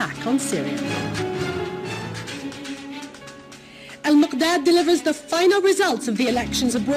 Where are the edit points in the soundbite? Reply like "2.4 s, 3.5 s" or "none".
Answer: 3.5 s